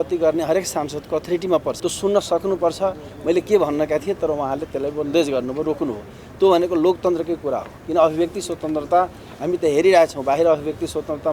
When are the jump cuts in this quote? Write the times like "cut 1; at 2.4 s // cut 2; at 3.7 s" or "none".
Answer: cut 1; at 1.8 s